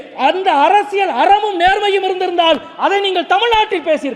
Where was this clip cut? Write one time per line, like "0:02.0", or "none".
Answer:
none